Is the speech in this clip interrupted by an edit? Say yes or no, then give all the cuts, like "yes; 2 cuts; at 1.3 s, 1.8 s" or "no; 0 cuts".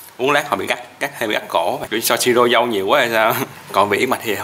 yes; 2 cuts; at 1.8 s, 3.5 s